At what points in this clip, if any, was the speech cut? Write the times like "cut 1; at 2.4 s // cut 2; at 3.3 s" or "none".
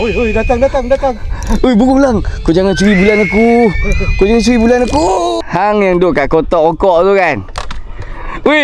cut 1; at 5.4 s